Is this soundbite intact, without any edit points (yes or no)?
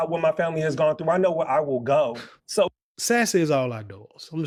yes